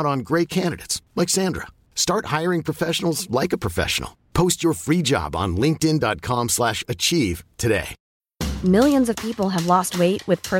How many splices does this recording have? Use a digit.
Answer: 1